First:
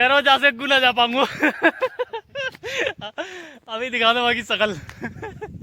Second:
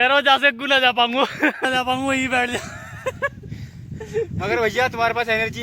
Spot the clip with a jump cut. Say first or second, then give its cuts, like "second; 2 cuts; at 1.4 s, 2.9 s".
second; 1 cut; at 1.6 s